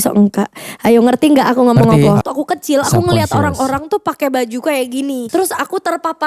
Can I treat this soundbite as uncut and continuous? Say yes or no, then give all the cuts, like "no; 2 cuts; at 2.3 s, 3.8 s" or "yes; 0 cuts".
no; 2 cuts; at 2.2 s, 5.2 s